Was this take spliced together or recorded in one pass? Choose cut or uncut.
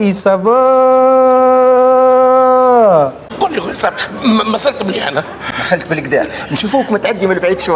cut